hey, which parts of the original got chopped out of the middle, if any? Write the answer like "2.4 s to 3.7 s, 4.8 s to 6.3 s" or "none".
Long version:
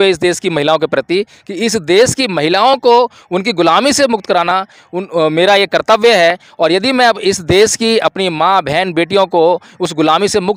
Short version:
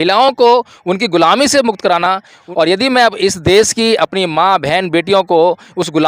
4.9 s to 6.5 s